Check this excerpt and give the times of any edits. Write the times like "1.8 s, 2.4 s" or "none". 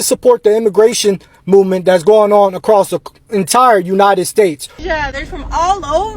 4.8 s

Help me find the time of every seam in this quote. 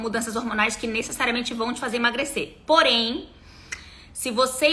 none

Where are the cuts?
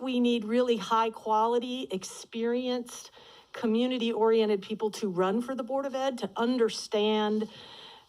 none

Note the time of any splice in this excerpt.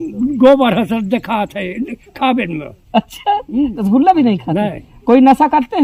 none

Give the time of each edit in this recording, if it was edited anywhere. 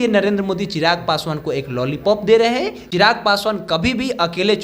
2.8 s

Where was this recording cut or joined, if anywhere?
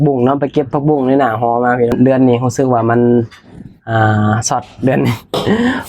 2.0 s

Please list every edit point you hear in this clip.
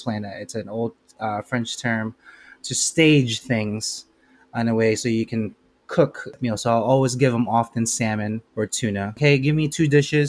6.4 s, 9.0 s

